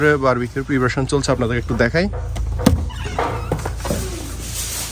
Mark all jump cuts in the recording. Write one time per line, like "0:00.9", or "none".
none